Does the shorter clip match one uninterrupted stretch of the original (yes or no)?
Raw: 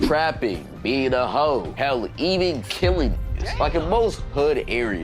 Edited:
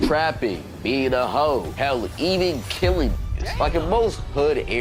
yes